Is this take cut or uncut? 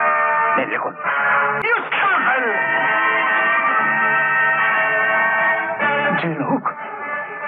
cut